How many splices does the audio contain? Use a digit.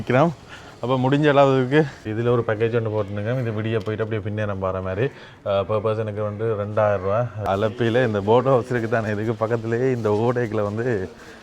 2